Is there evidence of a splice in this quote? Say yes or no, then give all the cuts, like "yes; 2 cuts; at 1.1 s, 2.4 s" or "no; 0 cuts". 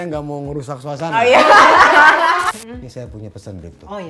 yes; 1 cut; at 2.5 s